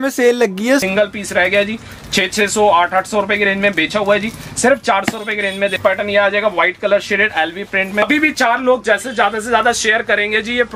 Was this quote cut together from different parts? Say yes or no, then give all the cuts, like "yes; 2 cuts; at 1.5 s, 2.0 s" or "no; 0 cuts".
yes; 3 cuts; at 0.8 s, 5.8 s, 8.0 s